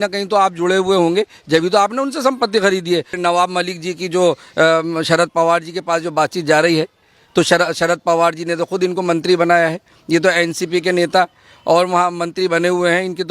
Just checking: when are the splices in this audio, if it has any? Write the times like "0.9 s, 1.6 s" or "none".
3.1 s